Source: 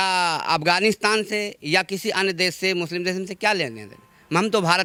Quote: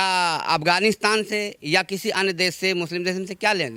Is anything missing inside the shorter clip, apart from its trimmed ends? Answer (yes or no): no